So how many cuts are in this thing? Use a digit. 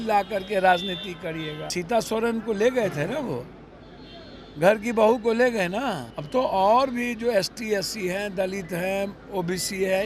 2